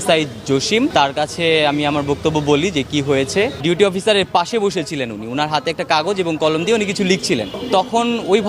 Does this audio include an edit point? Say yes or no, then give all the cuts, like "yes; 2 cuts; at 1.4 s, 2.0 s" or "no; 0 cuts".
yes; 3 cuts; at 0.9 s, 3.6 s, 7.5 s